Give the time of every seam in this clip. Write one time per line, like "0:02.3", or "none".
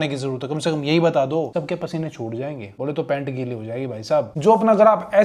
0:01.5
0:02.7
0:04.3